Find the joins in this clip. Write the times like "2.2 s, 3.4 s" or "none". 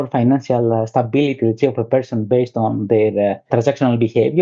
3.4 s